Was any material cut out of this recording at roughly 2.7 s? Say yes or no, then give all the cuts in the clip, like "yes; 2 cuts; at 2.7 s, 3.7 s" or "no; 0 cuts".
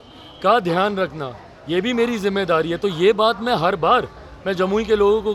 no; 0 cuts